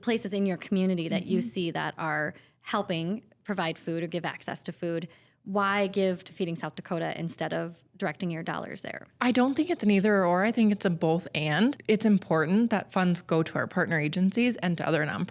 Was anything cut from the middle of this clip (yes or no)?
yes